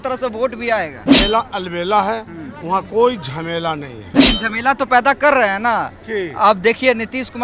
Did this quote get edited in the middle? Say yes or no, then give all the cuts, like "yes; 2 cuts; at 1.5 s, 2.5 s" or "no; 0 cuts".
yes; 2 cuts; at 1.0 s, 4.2 s